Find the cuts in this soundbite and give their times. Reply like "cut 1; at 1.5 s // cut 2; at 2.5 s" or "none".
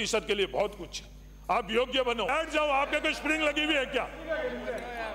cut 1; at 2.3 s